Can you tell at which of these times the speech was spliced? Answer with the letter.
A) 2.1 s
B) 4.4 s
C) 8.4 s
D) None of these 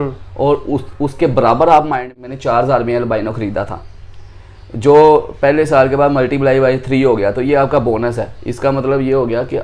A